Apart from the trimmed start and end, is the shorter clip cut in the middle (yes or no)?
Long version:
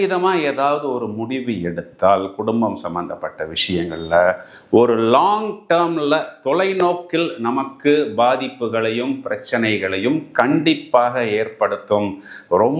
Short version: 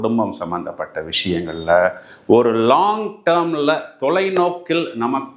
no